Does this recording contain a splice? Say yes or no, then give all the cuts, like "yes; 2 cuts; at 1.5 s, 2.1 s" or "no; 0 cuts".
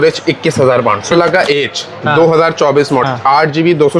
yes; 2 cuts; at 1.1 s, 3.1 s